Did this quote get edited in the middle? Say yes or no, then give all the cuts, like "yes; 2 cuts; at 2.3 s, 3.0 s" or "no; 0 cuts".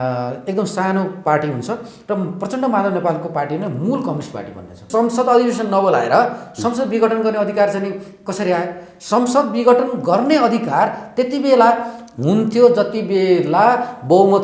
yes; 1 cut; at 4.8 s